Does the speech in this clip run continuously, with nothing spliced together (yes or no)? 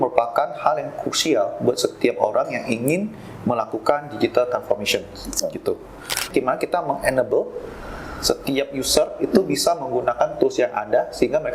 no